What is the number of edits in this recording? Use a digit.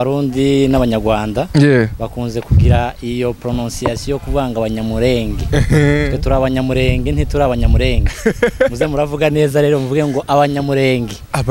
0